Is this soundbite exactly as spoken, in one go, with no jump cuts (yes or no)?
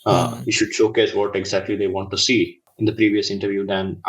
no